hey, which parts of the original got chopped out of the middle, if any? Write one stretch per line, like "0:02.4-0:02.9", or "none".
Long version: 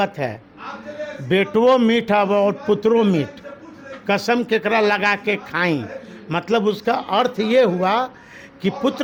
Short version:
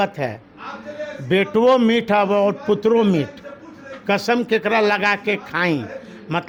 none

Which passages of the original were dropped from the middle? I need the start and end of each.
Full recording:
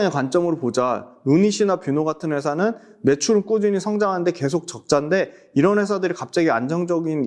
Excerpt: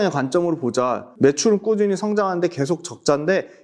0:01.1-0:02.9

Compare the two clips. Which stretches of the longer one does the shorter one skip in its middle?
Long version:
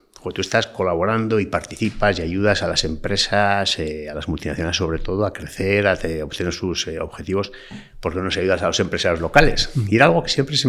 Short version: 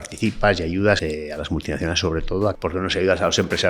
0:02.6-0:03.8
0:05.3-0:08.0

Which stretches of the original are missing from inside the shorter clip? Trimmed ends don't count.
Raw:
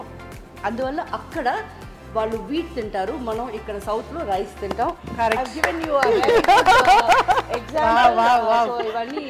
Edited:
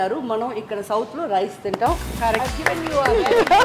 none

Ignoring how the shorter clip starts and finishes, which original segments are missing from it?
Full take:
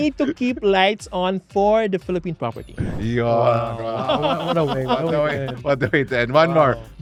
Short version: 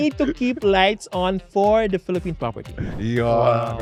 none

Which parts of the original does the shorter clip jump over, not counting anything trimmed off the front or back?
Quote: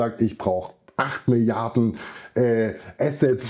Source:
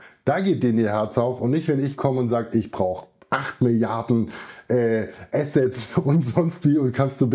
none

